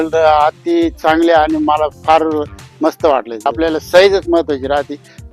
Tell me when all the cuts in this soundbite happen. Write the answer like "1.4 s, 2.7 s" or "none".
3.5 s